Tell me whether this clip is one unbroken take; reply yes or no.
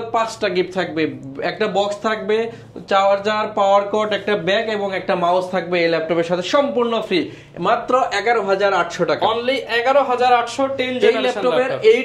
yes